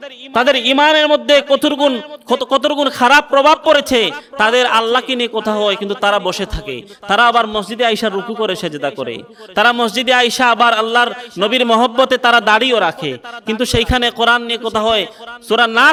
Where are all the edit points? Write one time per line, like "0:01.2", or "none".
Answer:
none